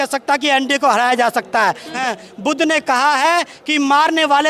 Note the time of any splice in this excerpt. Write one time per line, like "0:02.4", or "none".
0:02.0